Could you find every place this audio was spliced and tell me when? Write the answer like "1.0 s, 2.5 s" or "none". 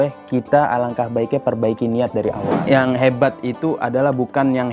2.5 s